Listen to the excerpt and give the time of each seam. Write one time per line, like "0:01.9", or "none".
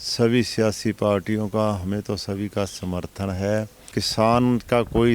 0:03.8